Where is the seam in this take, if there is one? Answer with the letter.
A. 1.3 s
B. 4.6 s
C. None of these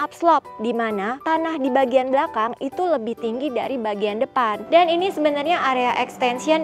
B